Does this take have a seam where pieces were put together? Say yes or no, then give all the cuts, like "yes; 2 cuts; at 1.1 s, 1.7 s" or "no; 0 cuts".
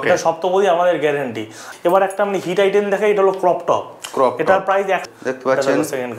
yes; 2 cuts; at 1.6 s, 5.0 s